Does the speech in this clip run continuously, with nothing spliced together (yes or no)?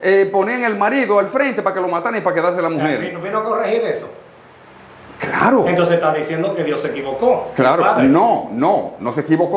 yes